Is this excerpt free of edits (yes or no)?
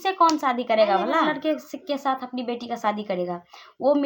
no